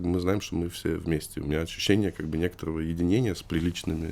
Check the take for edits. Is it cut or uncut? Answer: uncut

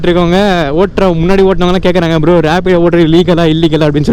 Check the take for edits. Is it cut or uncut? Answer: uncut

